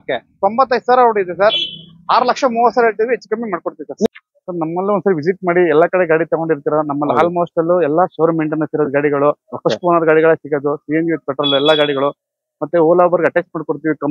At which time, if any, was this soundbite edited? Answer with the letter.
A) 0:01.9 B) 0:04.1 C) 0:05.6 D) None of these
B